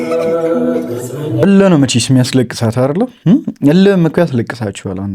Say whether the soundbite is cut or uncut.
cut